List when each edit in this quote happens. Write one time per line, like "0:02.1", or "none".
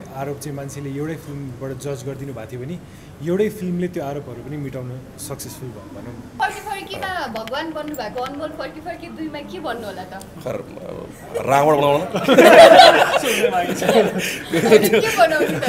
0:06.3